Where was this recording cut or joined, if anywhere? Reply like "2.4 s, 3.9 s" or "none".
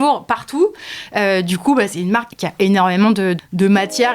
2.4 s, 3.4 s